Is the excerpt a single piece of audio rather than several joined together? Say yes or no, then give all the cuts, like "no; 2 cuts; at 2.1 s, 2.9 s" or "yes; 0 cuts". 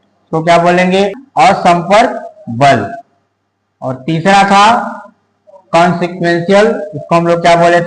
no; 1 cut; at 1.1 s